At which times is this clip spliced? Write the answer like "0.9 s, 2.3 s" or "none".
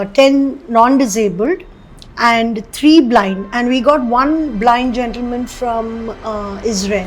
none